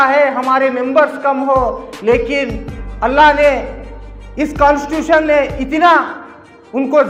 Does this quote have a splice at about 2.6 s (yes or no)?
no